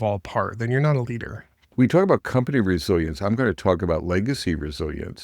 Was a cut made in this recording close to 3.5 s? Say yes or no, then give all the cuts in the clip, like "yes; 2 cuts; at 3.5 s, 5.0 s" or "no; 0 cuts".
no; 1 cut; at 1.7 s